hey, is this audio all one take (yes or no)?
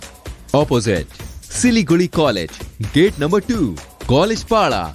yes